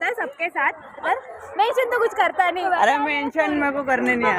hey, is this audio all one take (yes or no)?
no